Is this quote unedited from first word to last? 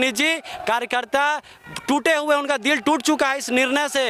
yes; 0 cuts

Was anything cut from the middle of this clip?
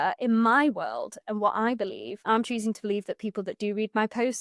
no; 0 cuts

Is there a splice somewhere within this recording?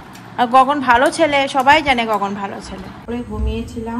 yes; 1 cut; at 3.0 s

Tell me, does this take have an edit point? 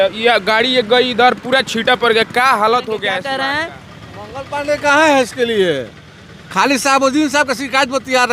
yes; 1 cut; at 3.2 s

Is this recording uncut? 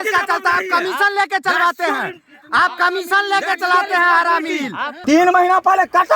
no; 1 cut; at 4.9 s

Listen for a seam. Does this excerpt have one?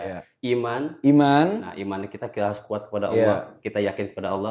no; 0 cuts

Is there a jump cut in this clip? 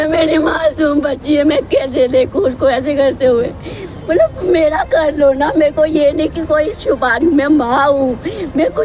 no; 0 cuts

